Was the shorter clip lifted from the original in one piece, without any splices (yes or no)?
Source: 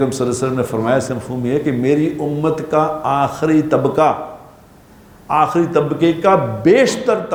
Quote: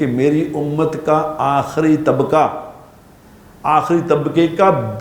yes